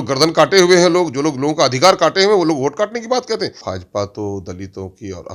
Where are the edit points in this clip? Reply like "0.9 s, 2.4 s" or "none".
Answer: 3.6 s